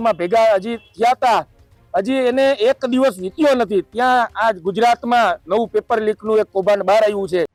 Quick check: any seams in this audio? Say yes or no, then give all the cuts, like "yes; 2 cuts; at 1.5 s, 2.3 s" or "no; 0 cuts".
no; 0 cuts